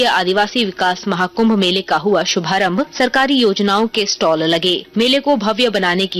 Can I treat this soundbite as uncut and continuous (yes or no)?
no